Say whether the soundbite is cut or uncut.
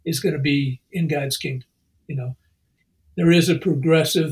cut